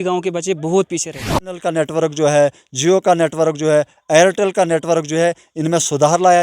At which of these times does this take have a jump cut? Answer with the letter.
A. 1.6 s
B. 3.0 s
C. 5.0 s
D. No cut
A